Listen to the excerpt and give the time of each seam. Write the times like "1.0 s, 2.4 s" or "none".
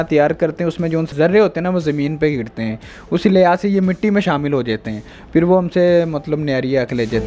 1.1 s